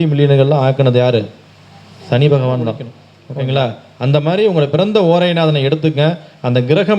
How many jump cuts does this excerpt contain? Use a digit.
1